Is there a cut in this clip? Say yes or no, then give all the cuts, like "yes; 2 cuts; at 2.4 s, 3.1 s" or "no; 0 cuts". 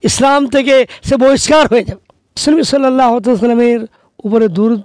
yes; 1 cut; at 2.4 s